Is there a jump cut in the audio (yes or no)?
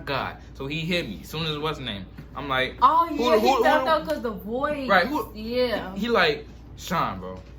no